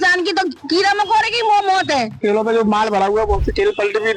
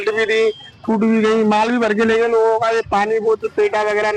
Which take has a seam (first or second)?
first